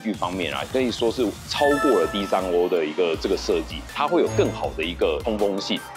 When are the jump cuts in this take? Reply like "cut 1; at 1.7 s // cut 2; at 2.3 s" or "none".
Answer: cut 1; at 3.9 s